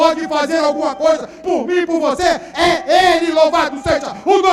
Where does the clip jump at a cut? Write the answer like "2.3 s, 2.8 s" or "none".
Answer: none

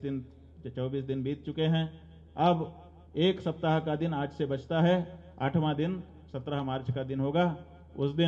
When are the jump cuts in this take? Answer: none

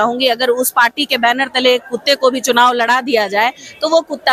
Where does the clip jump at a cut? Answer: none

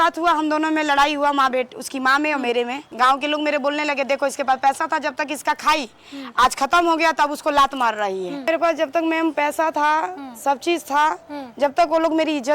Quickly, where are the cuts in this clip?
2.8 s, 8.5 s

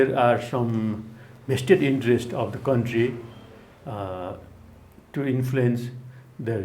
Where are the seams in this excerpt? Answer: none

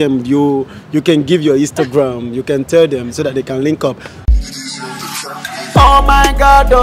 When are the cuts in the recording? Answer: 4.1 s

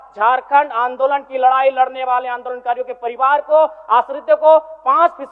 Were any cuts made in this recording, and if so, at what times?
none

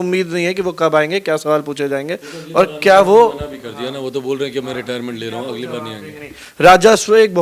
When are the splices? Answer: none

